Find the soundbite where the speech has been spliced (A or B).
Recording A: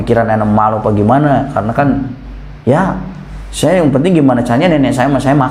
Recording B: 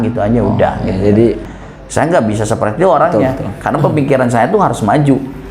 B